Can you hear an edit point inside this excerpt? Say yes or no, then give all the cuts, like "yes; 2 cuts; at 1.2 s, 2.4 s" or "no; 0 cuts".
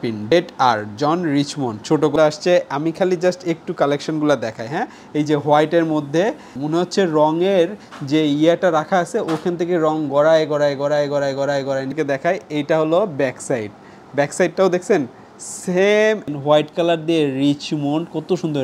yes; 3 cuts; at 2.1 s, 11.9 s, 16.3 s